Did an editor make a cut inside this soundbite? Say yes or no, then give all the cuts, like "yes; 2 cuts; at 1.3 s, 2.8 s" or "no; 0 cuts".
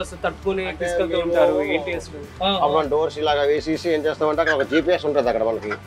yes; 1 cut; at 2.3 s